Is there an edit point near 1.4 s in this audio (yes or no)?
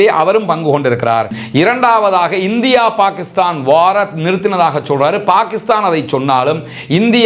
yes